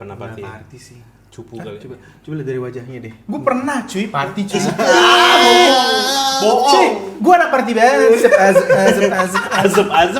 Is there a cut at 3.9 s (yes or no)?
no